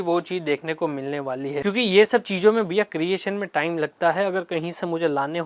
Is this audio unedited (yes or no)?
no